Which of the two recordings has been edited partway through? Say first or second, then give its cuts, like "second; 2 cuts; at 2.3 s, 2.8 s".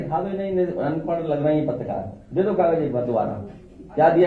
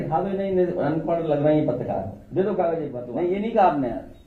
second; 1 cut; at 3.0 s